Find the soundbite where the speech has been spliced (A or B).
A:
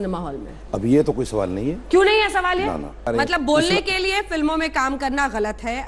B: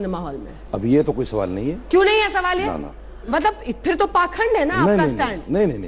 A